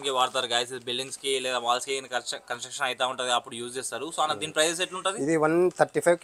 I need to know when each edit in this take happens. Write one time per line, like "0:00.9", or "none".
none